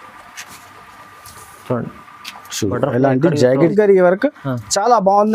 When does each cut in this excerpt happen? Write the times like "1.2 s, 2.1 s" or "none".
3.7 s